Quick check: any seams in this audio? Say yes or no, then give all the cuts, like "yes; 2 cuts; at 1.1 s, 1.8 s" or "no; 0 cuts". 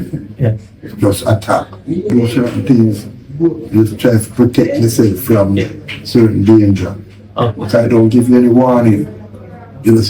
yes; 1 cut; at 2.1 s